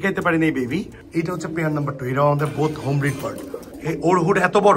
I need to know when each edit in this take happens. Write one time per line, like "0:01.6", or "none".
0:01.0